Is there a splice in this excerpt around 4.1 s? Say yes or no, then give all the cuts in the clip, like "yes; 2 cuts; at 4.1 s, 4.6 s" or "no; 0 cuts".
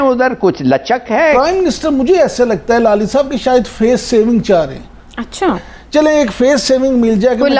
no; 2 cuts; at 1.4 s, 5.6 s